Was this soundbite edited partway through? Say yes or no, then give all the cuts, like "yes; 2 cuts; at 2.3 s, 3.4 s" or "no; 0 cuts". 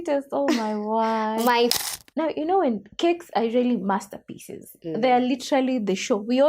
yes; 1 cut; at 1.7 s